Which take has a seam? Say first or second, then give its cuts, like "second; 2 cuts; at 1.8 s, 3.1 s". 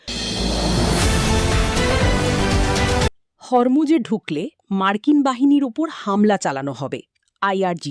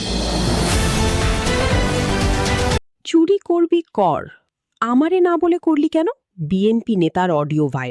second; 1 cut; at 6.3 s